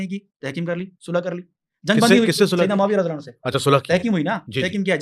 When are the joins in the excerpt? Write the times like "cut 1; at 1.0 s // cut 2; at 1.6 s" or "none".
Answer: none